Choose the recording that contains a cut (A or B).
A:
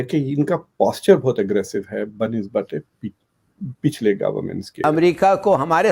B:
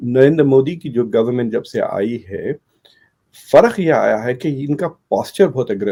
A